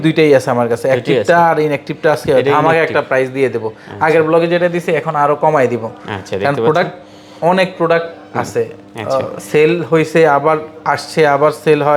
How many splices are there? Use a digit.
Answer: 0